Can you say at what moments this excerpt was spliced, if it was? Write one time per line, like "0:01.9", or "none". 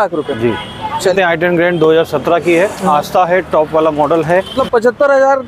0:01.1
0:04.6

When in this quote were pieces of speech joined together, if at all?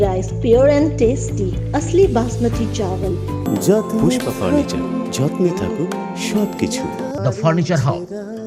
0:03.5
0:07.2

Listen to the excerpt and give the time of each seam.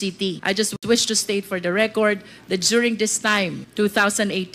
0:00.8
0:03.6

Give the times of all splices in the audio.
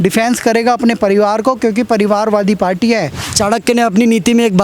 0:03.2

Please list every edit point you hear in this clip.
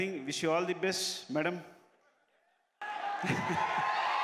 none

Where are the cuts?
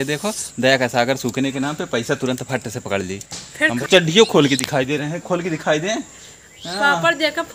0:03.8

